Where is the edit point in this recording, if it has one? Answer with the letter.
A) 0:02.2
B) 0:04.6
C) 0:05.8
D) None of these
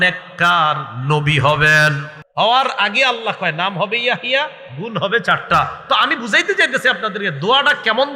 A